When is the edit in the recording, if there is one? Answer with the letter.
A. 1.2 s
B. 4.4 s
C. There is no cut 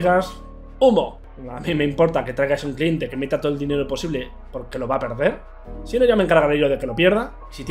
A